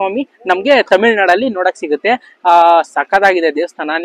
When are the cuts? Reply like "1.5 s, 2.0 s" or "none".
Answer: none